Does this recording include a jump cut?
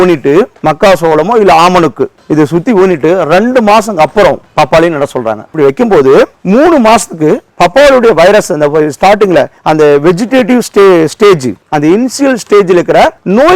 yes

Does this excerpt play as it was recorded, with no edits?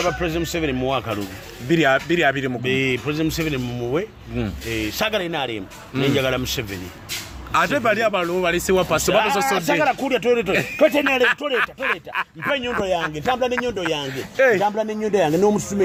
yes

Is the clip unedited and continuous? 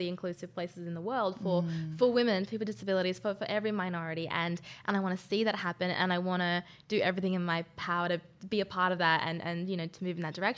yes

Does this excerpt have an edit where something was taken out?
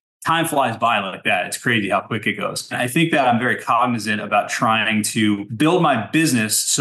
yes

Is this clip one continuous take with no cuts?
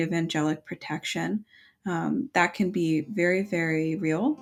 yes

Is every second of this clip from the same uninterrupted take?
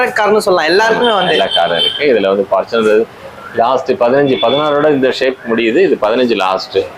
yes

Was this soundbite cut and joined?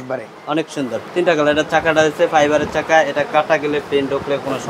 yes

